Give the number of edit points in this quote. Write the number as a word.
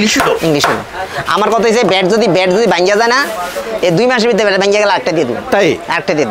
zero